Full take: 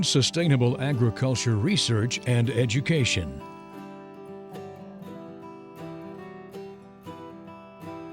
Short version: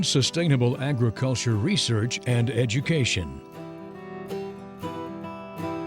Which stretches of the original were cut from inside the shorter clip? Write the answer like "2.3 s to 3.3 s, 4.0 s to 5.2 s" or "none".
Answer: 3.3 s to 5.6 s